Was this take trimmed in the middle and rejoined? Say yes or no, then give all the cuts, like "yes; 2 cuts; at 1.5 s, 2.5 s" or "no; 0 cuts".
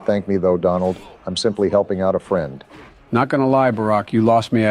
no; 0 cuts